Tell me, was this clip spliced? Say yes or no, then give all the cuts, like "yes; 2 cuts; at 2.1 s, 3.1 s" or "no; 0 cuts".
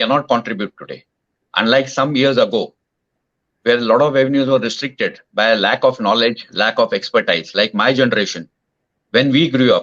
no; 0 cuts